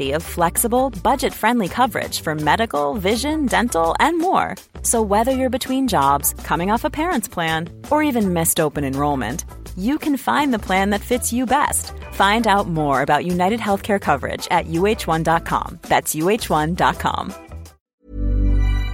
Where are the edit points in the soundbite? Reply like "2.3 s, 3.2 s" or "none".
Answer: 17.8 s